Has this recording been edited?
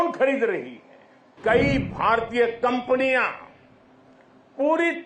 yes; 1 cut; at 1.3 s

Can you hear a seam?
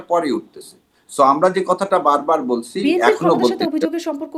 no; 0 cuts

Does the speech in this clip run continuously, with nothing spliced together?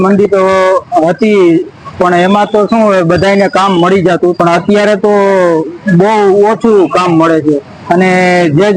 no; 1 cut; at 4.4 s

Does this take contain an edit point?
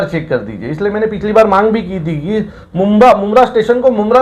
no; 0 cuts

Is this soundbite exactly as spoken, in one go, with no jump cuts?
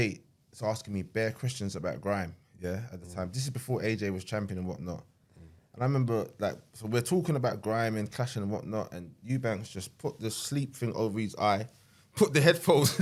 yes; 0 cuts

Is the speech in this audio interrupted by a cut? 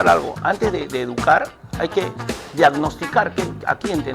no; 0 cuts

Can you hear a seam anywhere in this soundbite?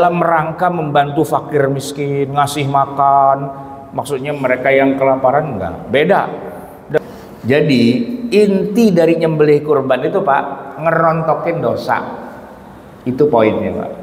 yes; 1 cut; at 7.0 s

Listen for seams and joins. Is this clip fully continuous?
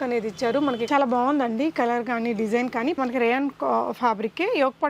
no; 2 cuts; at 0.8 s, 3.0 s

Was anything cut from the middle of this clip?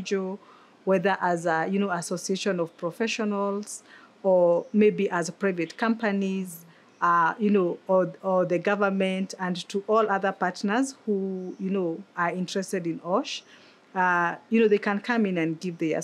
no; 0 cuts

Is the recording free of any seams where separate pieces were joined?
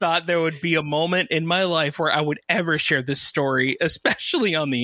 yes; 0 cuts

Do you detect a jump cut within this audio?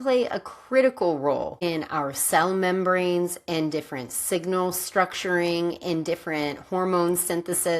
yes; 1 cut; at 1.6 s

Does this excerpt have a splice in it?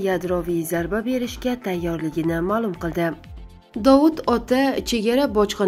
yes; 1 cut; at 3.3 s

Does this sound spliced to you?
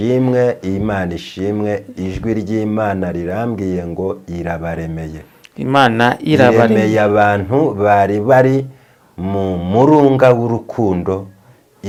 no; 0 cuts

